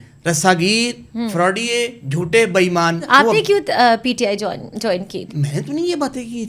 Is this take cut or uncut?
cut